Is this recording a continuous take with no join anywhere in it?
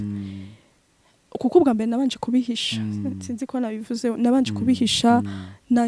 yes; 0 cuts

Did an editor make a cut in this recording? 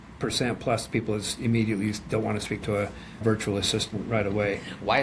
yes; 1 cut; at 3.2 s

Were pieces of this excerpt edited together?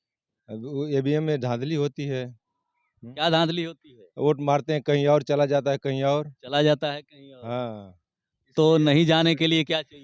no; 0 cuts

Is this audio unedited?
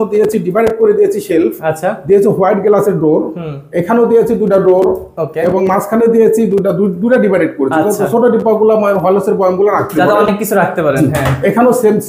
yes; 0 cuts

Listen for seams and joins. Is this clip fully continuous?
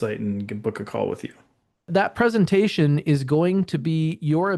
no; 1 cut; at 1.9 s

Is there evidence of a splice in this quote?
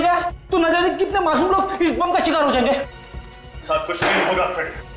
no; 0 cuts

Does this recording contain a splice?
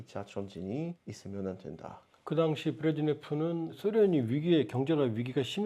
no; 0 cuts

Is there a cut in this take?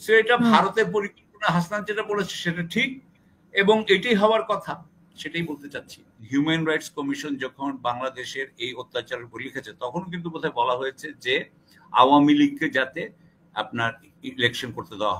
yes; 1 cut; at 6.1 s

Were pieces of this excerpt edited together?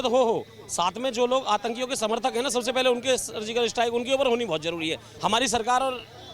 yes; 1 cut; at 5.1 s

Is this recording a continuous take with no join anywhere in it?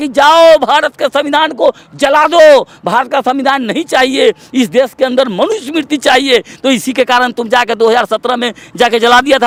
yes; 0 cuts

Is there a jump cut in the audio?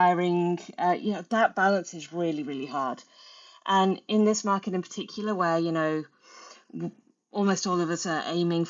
no; 0 cuts

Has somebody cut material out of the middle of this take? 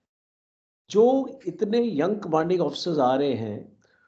no; 0 cuts

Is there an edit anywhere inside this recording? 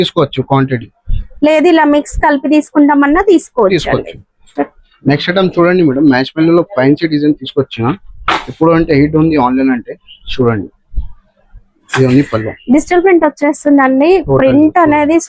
no; 0 cuts

